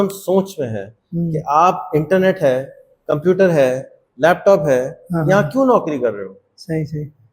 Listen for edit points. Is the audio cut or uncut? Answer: uncut